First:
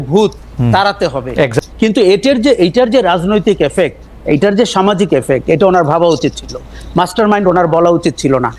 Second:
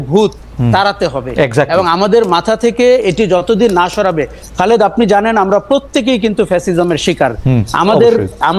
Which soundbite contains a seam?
first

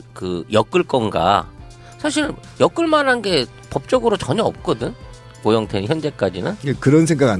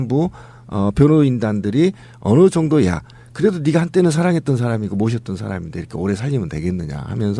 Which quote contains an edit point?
second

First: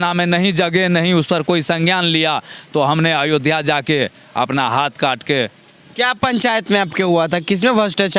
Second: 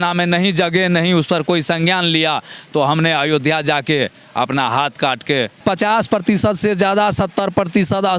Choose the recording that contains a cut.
second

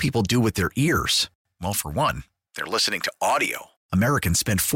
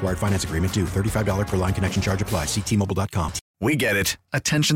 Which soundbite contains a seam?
second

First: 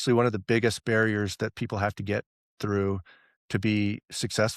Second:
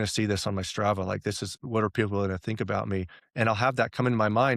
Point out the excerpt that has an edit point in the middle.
second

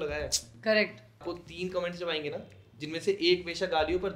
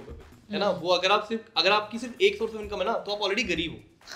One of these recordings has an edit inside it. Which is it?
first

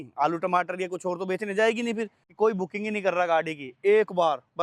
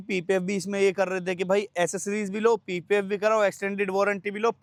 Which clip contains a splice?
first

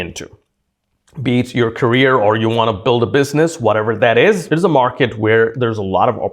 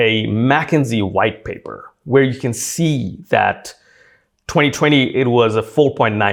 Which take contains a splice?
first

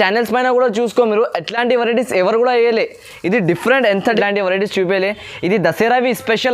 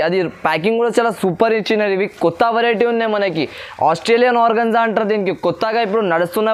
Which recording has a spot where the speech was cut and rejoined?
first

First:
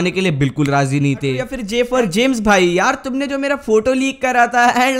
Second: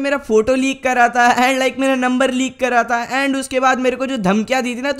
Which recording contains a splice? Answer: first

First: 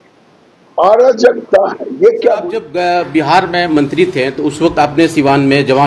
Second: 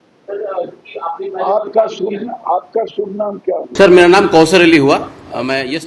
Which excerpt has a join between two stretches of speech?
first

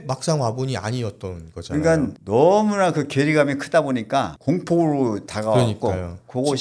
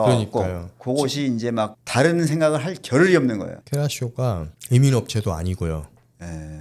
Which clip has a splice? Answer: second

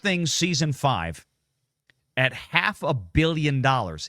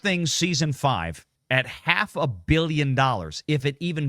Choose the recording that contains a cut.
second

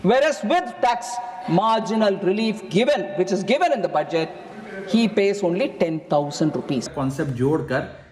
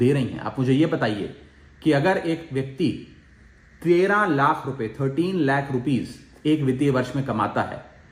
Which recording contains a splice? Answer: first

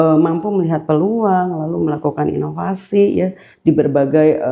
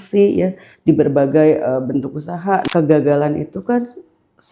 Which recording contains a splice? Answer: second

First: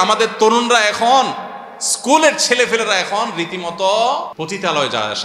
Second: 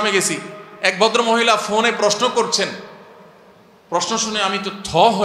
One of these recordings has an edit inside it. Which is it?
first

